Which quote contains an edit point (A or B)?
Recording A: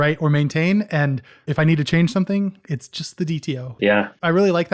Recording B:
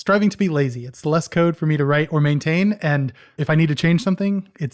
A